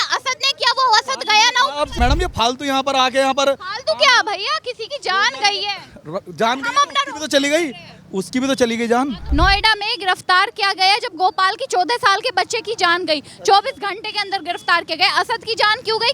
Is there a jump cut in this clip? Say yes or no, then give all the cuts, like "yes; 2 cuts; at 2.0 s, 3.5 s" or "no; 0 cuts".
yes; 2 cuts; at 2.0 s, 9.2 s